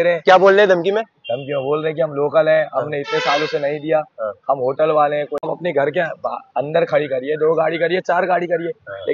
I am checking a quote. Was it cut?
yes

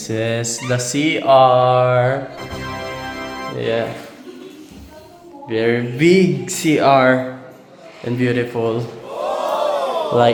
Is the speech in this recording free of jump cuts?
yes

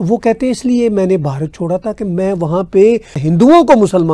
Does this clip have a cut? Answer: yes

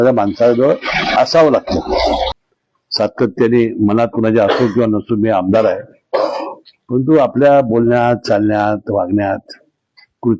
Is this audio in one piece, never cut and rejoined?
no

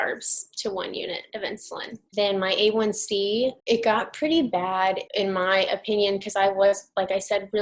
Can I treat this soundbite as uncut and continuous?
no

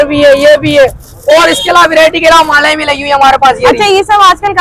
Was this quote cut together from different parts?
no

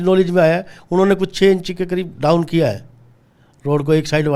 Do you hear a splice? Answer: no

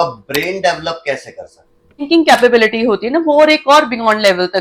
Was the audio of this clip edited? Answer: yes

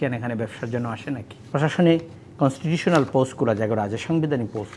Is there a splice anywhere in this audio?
yes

